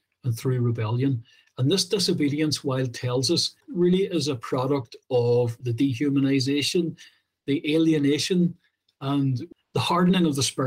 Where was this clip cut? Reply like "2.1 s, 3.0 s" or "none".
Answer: 3.6 s, 5.5 s, 9.4 s